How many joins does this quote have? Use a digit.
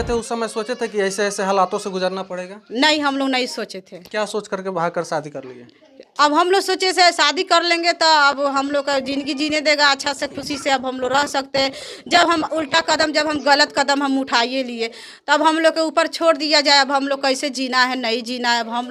0